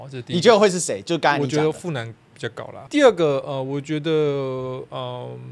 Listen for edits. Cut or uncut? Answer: cut